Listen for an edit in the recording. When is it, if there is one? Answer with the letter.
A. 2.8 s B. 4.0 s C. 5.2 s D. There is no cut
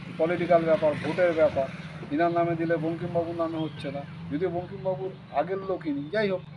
D